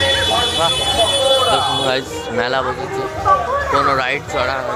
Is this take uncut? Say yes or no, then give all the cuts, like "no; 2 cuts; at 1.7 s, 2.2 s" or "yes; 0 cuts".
yes; 0 cuts